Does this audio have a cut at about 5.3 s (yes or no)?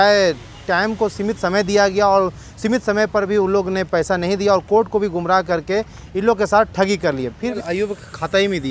no